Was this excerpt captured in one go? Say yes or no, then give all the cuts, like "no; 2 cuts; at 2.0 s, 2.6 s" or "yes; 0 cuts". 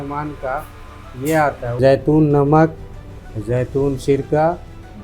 no; 1 cut; at 1.8 s